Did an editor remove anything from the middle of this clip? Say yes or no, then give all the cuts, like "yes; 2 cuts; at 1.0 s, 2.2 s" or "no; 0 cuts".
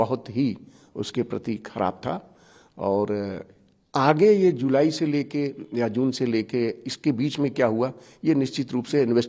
no; 0 cuts